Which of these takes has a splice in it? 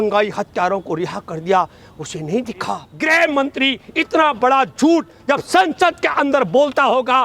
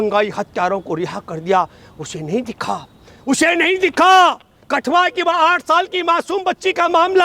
first; 1 cut; at 2.9 s

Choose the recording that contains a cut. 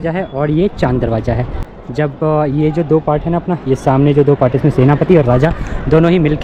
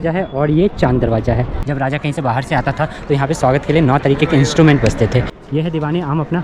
second; 2 cuts; at 1.6 s, 5.4 s

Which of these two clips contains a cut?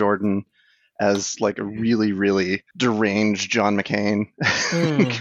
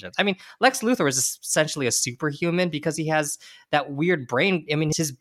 first; 1 cut; at 2.7 s

